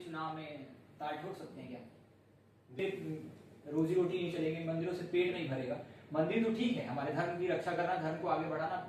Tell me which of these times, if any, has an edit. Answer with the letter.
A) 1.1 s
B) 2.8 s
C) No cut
B